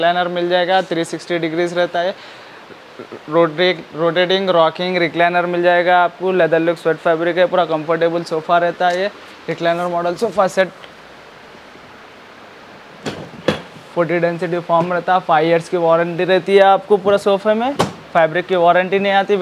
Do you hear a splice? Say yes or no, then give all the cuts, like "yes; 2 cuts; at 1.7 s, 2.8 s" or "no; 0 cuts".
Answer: no; 0 cuts